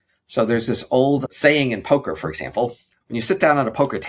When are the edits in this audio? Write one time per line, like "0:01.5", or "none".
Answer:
0:01.3
0:02.9